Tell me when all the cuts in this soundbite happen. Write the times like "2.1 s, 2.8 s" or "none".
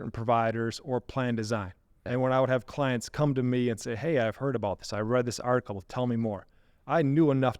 2.0 s